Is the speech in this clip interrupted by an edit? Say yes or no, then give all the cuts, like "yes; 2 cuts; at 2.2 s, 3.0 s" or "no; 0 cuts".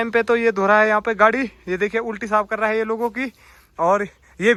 no; 0 cuts